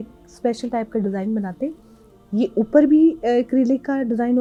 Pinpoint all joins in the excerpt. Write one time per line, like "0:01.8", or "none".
none